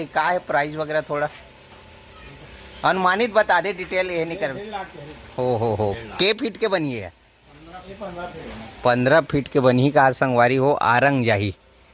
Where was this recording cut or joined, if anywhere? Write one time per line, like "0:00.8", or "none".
none